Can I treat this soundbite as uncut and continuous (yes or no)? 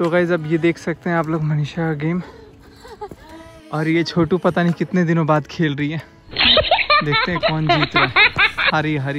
yes